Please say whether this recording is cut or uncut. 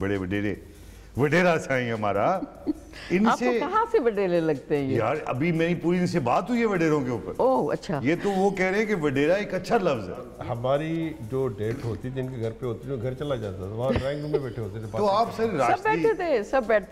cut